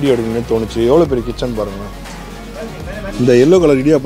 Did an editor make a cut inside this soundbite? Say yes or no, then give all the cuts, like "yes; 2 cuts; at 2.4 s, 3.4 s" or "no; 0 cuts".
yes; 1 cut; at 3.1 s